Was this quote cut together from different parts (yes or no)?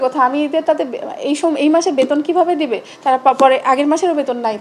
no